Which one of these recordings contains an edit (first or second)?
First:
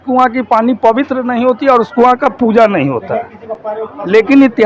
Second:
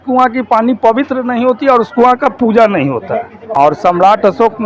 second